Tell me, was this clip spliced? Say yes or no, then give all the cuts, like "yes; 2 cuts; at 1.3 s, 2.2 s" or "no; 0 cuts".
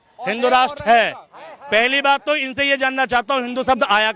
no; 0 cuts